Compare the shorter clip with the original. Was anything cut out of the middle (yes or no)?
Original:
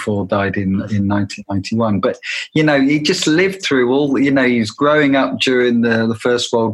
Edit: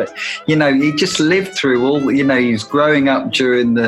no